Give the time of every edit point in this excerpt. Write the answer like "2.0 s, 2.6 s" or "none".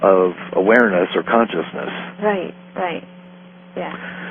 2.7 s

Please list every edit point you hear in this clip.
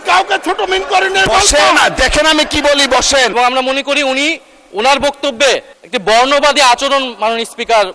3.3 s, 5.8 s

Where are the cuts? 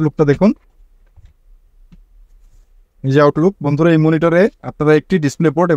none

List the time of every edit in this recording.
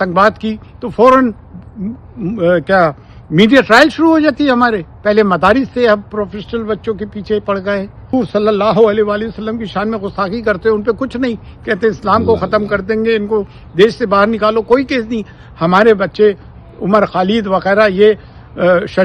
8.1 s

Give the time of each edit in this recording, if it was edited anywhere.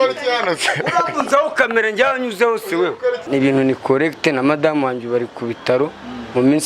3.3 s

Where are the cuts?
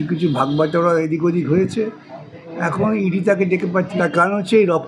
3.9 s

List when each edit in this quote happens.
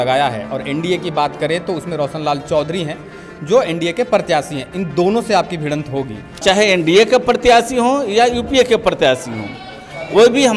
6.4 s

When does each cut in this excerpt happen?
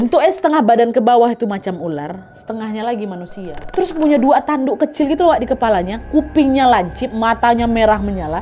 3.7 s

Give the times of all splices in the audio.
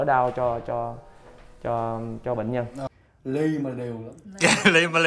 2.9 s

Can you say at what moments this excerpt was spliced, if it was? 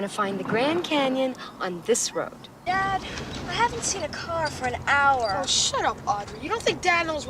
2.5 s

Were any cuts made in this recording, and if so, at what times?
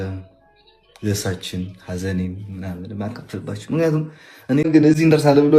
4.6 s

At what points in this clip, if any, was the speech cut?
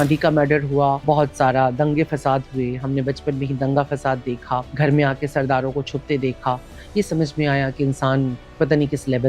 1.0 s, 4.7 s

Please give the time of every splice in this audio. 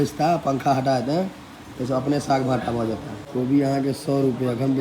3.1 s

